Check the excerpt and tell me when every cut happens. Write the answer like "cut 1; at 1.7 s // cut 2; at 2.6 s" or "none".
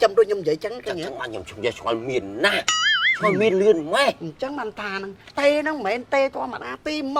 none